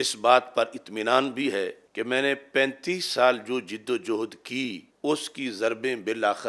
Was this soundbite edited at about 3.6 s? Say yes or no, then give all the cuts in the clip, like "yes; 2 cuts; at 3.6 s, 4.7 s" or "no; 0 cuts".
no; 2 cuts; at 1.8 s, 4.9 s